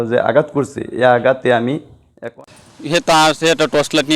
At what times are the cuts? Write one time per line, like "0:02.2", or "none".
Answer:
0:02.3